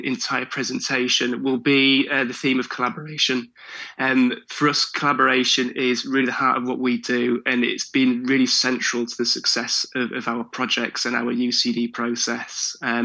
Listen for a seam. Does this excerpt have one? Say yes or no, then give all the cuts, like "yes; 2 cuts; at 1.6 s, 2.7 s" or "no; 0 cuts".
no; 0 cuts